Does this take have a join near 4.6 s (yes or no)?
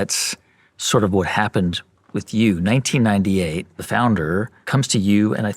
yes